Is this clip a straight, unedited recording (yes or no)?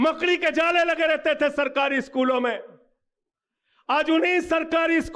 yes